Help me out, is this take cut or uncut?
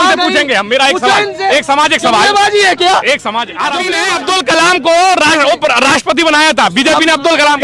cut